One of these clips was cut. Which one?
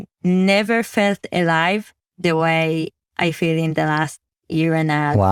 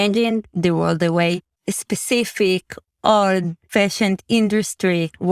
second; 2 cuts; at 1.5 s, 3.6 s

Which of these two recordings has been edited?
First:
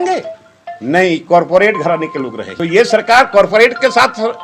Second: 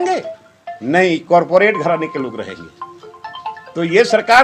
first; 1 cut; at 2.5 s

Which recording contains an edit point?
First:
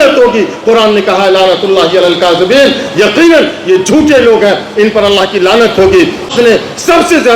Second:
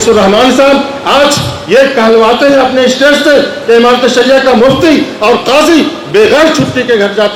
first; 1 cut; at 6.3 s

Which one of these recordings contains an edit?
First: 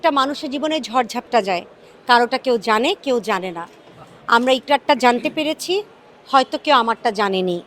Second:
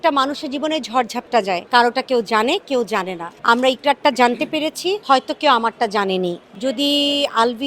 second; 4 cuts; at 1.6 s, 3.2 s, 5.0 s, 6.4 s

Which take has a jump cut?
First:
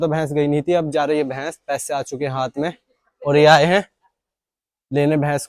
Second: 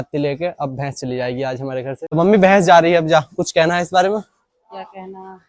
second; 1 cut; at 2.0 s

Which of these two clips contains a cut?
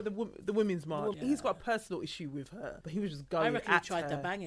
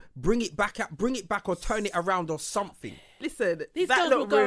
first; 2 cuts; at 1.2 s, 2.8 s

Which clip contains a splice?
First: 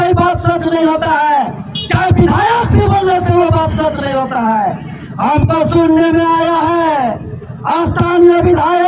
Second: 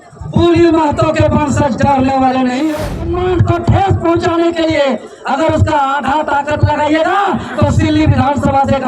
second; 1 cut; at 3.2 s

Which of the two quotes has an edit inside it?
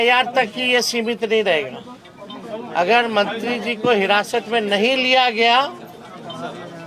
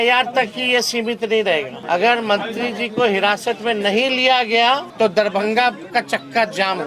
second; 2 cuts; at 1.8 s, 4.9 s

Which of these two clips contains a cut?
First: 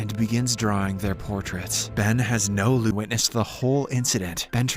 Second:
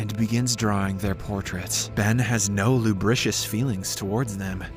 first; 1 cut; at 2.9 s

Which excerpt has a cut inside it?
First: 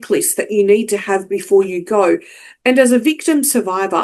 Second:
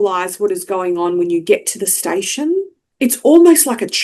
second; 1 cut; at 2.8 s

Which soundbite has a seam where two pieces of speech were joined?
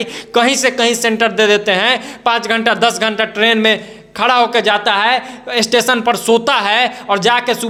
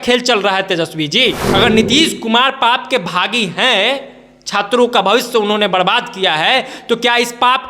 second; 1 cut; at 1.4 s

